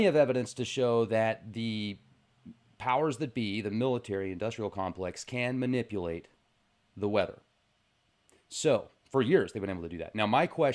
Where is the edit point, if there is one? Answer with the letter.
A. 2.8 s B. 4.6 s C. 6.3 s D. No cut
D